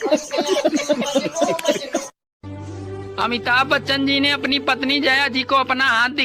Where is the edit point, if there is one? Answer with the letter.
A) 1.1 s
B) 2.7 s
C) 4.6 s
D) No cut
A